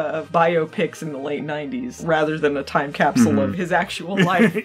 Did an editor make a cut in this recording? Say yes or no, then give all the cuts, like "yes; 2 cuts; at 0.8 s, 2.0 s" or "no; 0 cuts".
no; 0 cuts